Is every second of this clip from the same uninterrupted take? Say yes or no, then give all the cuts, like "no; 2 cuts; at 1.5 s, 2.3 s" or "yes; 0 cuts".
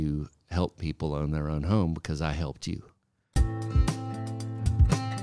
no; 1 cut; at 3.4 s